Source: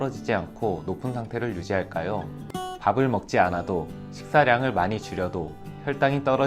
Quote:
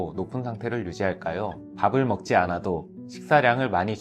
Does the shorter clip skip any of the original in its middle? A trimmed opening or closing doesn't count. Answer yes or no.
yes